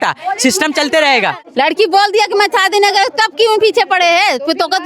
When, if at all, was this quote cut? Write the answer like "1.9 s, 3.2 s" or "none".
1.4 s